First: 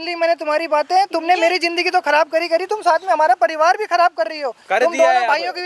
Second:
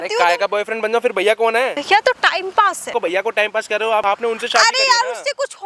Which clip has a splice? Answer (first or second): second